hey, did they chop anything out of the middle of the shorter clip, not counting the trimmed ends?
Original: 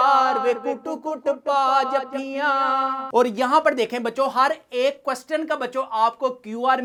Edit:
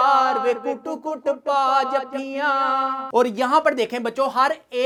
no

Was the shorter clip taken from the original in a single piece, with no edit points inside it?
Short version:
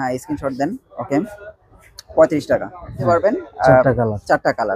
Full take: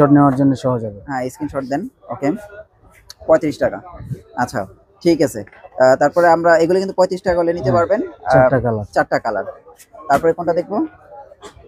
no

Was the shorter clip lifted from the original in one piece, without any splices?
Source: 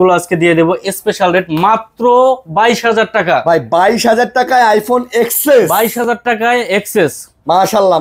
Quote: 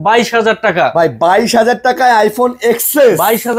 yes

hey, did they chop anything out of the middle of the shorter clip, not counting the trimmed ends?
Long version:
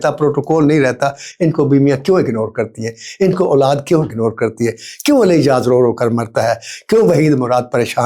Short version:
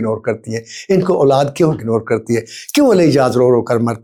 no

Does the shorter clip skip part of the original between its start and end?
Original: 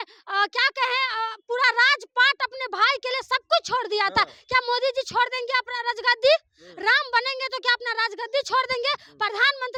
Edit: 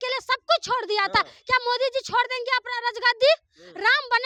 no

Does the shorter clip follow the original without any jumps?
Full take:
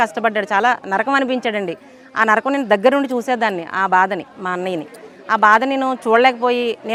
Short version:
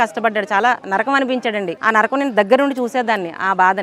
no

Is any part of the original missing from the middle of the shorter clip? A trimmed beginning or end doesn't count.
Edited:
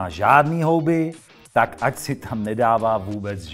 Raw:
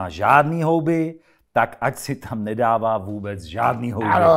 no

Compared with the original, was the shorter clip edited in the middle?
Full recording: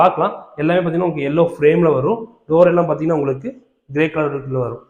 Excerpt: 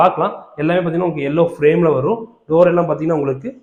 no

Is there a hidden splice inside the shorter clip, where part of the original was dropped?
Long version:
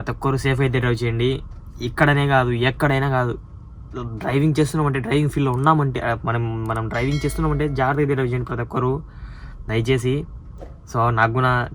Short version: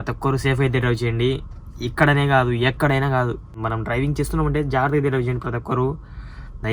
yes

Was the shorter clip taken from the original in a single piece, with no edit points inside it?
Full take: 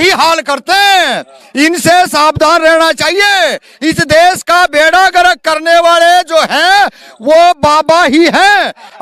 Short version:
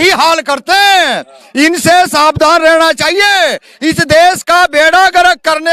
yes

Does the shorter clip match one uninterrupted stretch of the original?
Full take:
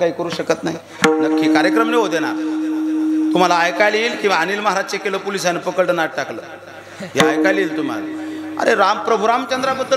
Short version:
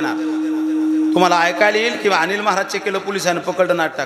yes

